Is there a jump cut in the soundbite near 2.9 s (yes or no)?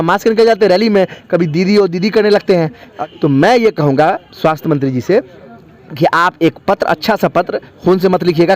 yes